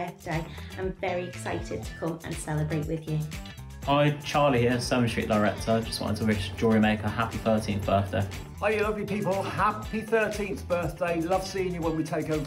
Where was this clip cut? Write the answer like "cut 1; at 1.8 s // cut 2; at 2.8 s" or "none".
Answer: none